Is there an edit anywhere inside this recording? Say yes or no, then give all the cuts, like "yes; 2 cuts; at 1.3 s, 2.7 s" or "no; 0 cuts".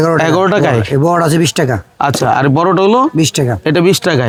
no; 0 cuts